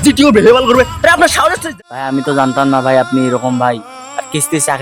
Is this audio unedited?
no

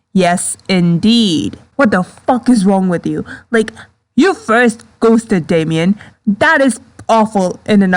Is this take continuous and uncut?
no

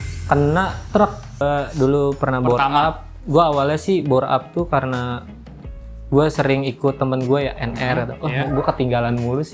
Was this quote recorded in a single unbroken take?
no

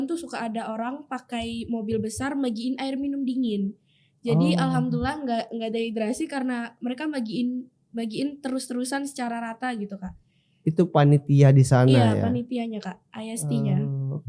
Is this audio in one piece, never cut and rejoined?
yes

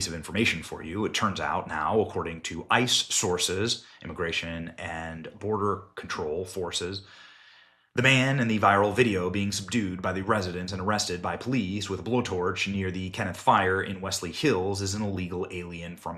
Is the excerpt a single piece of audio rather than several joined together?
yes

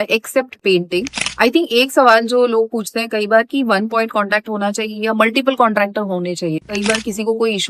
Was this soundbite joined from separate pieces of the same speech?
yes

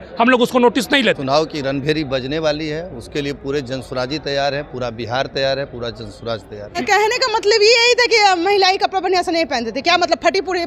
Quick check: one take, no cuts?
no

